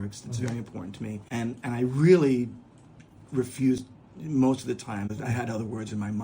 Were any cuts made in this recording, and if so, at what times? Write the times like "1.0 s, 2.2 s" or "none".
1.2 s, 5.1 s